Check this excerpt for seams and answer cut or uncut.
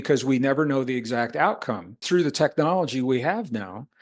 cut